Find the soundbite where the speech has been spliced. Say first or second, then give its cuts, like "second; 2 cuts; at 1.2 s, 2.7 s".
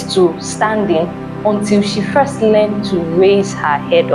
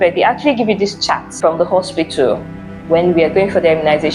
second; 1 cut; at 1.3 s